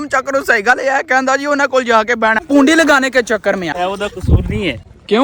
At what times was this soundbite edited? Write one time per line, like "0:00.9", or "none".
0:02.4
0:03.7